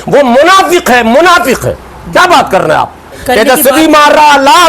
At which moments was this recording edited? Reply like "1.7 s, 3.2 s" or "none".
3.1 s